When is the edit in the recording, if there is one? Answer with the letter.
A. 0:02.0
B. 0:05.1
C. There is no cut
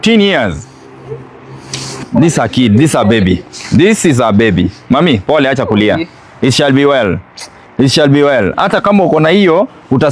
A